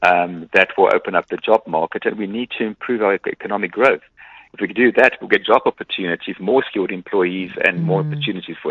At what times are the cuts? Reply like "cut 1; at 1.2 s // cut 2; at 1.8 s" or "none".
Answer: none